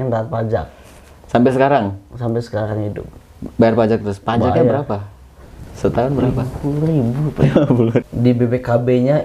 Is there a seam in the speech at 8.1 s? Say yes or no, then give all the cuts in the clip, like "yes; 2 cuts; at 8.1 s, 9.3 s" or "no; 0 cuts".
yes; 1 cut; at 8.1 s